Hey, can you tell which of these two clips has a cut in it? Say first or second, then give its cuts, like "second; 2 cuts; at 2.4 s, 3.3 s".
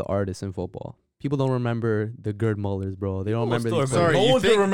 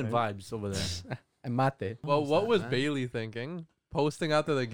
second; 1 cut; at 2.0 s